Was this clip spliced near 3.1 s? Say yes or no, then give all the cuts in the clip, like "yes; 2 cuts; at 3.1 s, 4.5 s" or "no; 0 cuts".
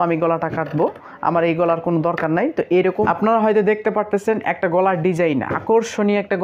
yes; 1 cut; at 3.1 s